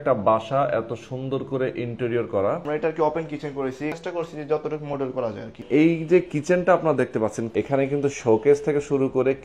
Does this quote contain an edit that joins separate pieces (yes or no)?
yes